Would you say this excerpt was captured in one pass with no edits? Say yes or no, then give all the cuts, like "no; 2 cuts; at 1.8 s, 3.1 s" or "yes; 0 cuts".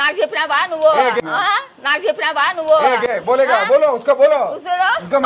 yes; 0 cuts